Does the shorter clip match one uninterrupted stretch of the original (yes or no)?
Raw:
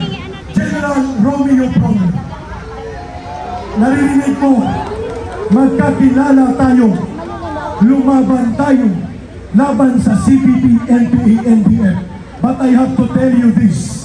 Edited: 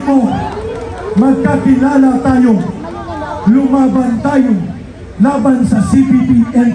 yes